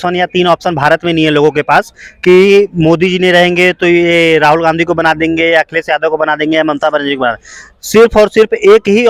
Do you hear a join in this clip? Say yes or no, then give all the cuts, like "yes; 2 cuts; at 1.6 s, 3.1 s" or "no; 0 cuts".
no; 0 cuts